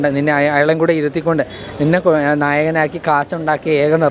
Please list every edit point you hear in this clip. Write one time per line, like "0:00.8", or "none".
none

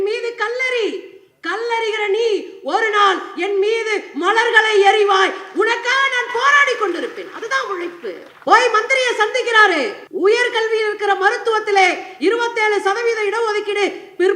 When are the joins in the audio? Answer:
0:08.3
0:10.0

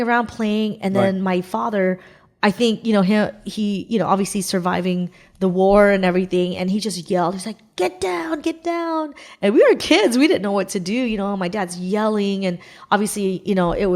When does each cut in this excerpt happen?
none

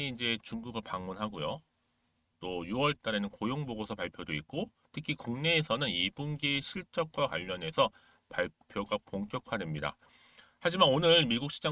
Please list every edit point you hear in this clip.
none

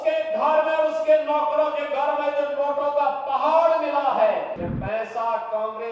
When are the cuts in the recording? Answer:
0:04.6

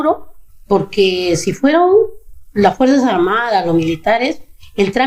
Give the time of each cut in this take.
none

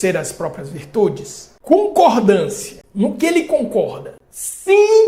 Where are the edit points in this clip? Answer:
0:01.7

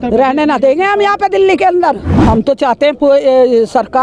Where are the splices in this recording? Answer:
0:02.1

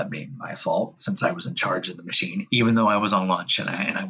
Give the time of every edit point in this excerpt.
none

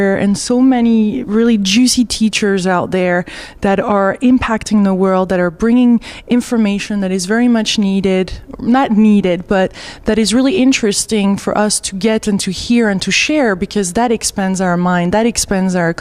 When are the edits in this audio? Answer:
none

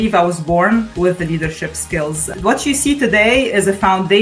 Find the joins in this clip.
0:00.9
0:02.3

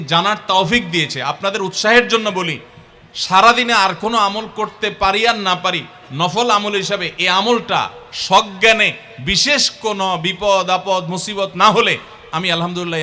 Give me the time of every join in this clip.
none

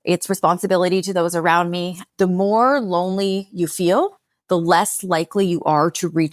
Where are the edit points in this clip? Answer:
0:01.9

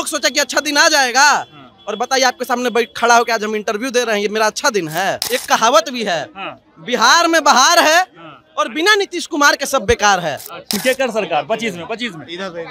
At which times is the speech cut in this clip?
0:05.2
0:10.8

